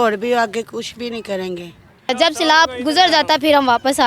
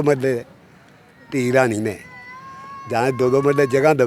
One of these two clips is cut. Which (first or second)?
first